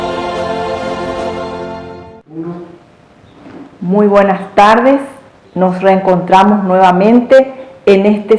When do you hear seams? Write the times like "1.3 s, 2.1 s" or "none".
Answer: 2.2 s